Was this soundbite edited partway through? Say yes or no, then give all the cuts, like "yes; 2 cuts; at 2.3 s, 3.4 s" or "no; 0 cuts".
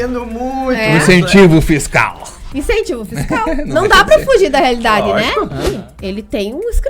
yes; 1 cut; at 5.6 s